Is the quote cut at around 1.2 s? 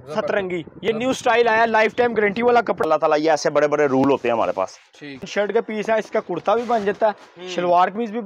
no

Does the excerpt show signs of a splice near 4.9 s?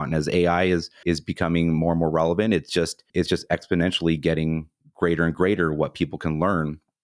no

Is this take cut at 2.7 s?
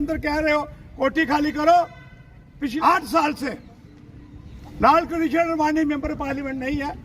yes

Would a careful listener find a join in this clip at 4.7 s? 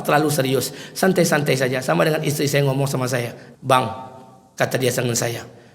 no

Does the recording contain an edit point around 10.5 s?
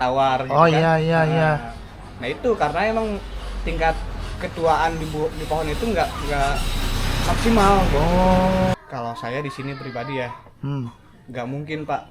no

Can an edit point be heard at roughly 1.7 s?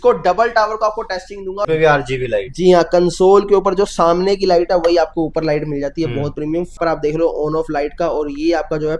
yes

